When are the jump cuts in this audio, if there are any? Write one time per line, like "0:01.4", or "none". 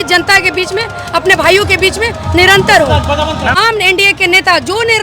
0:03.6